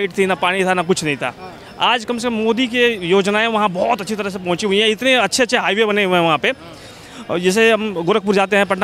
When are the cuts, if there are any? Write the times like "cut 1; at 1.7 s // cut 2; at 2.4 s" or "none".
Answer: none